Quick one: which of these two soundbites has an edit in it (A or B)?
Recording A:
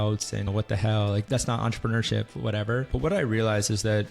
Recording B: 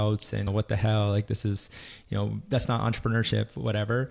A